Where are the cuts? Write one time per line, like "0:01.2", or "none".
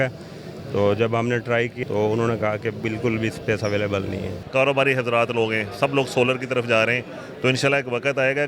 0:01.7
0:04.4